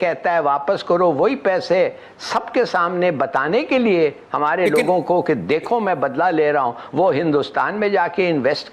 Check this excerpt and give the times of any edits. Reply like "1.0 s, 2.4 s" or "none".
none